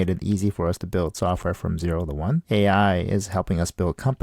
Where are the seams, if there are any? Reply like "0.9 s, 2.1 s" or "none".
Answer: 2.4 s